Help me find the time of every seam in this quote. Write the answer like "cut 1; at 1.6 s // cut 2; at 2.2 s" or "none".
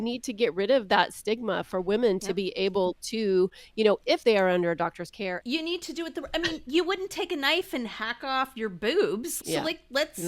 cut 1; at 5.4 s // cut 2; at 9.3 s